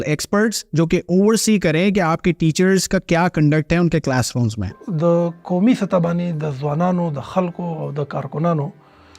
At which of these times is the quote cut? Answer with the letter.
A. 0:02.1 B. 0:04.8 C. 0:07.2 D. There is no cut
B